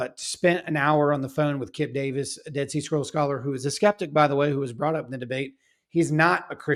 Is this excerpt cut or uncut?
uncut